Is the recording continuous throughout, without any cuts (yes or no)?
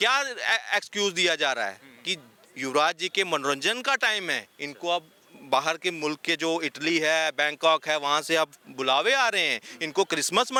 yes